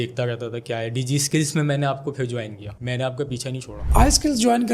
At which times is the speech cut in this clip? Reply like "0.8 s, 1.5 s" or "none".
3.7 s